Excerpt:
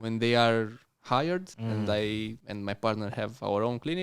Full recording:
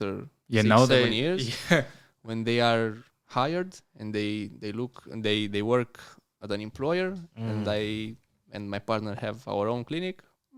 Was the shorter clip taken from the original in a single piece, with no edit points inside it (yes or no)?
no